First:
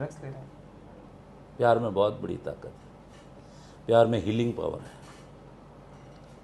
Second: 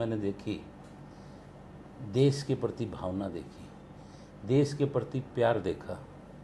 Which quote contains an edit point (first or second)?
first